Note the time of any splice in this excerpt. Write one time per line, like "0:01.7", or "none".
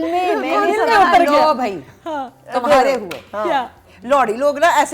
0:03.8

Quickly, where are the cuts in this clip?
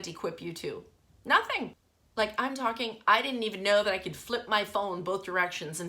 0:01.8

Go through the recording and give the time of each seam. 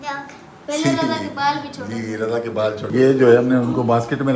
0:02.8

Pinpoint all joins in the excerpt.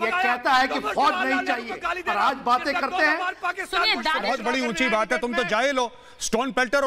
0:04.2

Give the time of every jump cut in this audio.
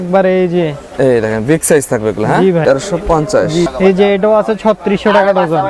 0:02.6
0:03.7

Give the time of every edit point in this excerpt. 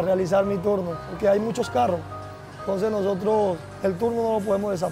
0:01.0

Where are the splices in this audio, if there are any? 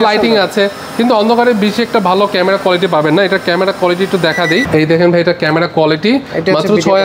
none

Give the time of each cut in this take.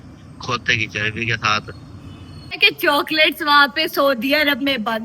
0:02.7

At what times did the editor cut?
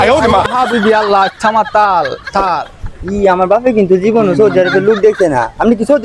none

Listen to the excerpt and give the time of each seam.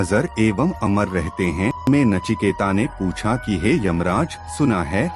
0:01.9

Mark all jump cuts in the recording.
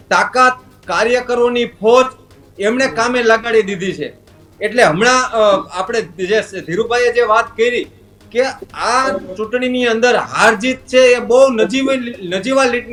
none

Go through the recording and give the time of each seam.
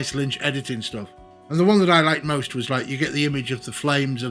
0:01.3

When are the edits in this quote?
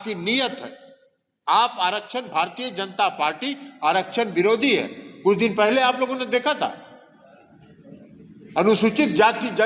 none

